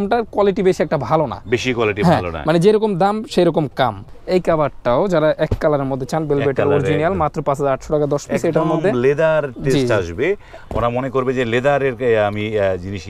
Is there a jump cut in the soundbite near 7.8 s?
no; 1 cut; at 4.1 s

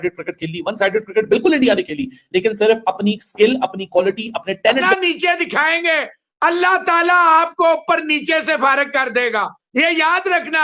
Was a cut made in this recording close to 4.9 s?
yes; 1 cut; at 4.9 s

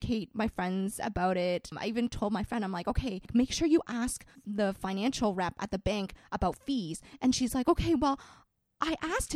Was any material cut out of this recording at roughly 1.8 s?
yes; 2 cuts; at 1.8 s, 3.3 s

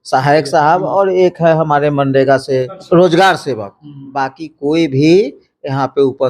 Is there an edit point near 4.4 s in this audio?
no; 1 cut; at 2.8 s

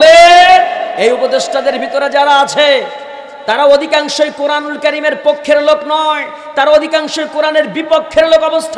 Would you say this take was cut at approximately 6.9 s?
no; 1 cut; at 0.9 s

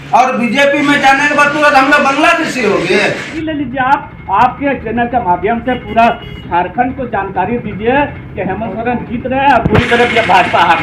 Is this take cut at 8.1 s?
no; 1 cut; at 3.3 s

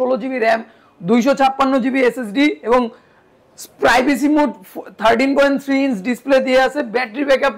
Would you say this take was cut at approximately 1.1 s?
no; 0 cuts

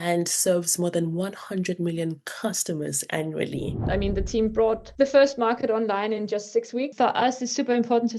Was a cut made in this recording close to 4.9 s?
yes; 3 cuts; at 3.8 s, 4.9 s, 6.9 s

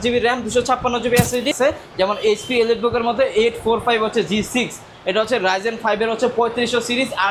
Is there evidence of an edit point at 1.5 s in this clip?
yes; 1 cut; at 1.5 s

